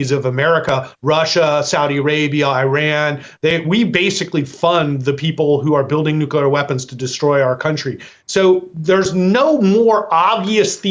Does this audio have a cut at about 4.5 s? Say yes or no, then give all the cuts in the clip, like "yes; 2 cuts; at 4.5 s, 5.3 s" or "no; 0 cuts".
no; 1 cut; at 8.0 s